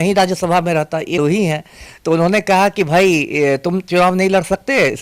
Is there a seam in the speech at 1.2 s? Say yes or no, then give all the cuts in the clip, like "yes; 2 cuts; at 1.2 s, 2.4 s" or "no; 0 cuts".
yes; 1 cut; at 1.2 s